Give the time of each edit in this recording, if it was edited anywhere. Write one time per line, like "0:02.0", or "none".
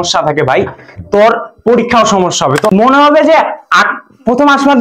0:02.7

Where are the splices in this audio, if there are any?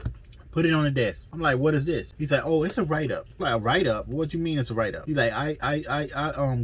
0:01.3
0:02.1
0:03.3
0:05.0

